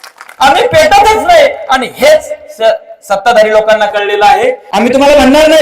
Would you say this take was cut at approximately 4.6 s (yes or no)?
yes